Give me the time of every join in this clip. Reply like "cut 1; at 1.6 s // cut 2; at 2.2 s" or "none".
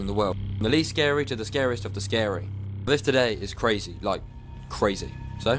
none